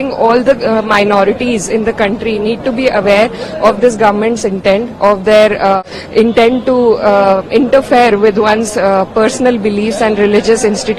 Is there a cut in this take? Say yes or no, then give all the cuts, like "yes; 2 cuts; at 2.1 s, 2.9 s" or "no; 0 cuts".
yes; 1 cut; at 5.8 s